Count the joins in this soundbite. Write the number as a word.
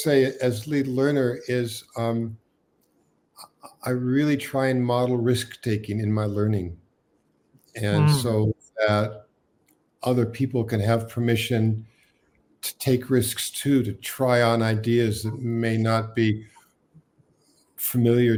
zero